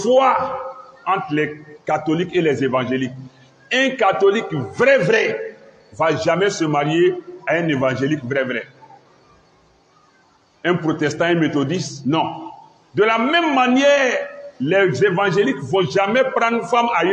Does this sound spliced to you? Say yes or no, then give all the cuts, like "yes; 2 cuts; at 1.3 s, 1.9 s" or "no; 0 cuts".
no; 0 cuts